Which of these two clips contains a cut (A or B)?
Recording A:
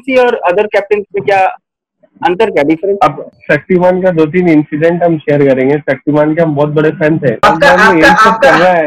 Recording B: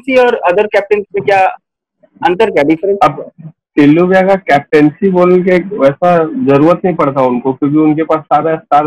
A